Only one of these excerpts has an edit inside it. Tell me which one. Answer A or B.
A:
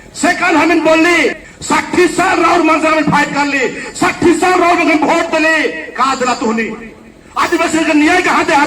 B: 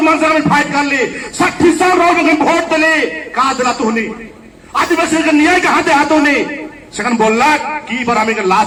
A